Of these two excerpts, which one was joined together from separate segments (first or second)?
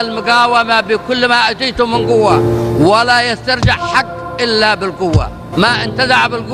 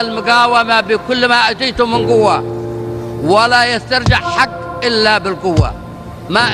first